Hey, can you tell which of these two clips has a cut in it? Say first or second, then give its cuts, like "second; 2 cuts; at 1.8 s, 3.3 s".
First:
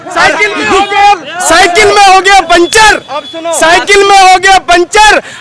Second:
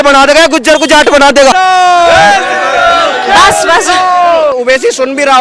second; 2 cuts; at 1.5 s, 4.5 s